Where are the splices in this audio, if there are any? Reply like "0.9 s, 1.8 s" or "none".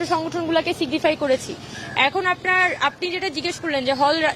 none